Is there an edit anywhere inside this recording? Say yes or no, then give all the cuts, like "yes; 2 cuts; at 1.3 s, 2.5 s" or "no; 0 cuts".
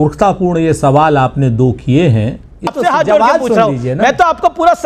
yes; 1 cut; at 2.7 s